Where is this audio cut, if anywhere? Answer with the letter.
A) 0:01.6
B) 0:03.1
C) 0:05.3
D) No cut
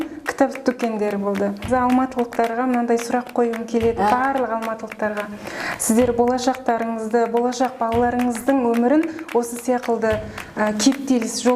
A